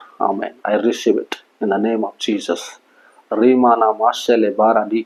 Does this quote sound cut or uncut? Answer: uncut